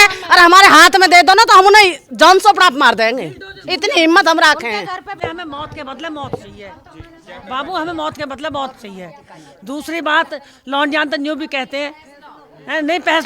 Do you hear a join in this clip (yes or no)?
yes